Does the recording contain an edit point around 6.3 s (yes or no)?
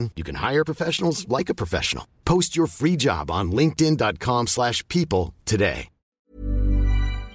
yes